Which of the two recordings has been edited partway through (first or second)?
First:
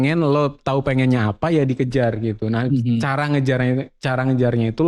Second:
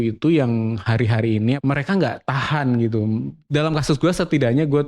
second